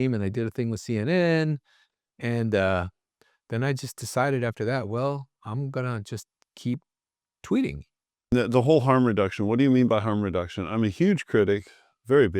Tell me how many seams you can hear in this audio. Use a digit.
1